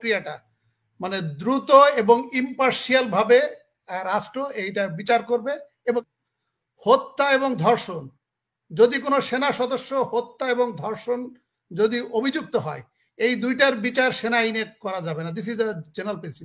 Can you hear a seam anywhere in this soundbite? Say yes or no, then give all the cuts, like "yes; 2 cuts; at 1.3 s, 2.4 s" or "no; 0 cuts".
yes; 1 cut; at 6.0 s